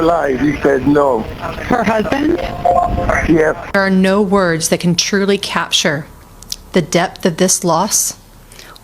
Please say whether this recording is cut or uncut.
cut